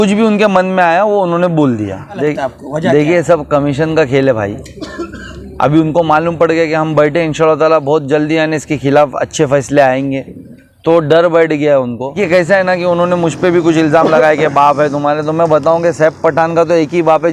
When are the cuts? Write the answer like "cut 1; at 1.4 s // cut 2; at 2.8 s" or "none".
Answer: cut 1; at 2.2 s // cut 2; at 12.2 s